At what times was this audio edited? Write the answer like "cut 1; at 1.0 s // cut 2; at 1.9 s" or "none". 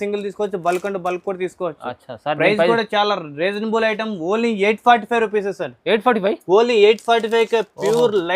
none